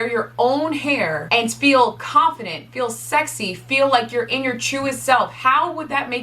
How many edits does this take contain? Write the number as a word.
one